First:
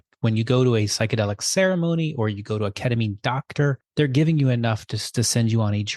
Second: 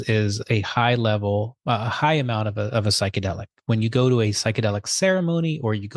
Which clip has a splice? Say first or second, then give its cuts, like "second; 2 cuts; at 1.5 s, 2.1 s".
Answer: first; 1 cut; at 3.8 s